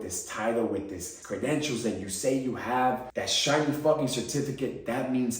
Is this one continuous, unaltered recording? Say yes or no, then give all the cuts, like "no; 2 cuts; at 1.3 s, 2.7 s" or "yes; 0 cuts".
no; 2 cuts; at 1.1 s, 3.1 s